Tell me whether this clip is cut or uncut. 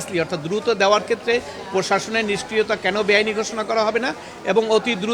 uncut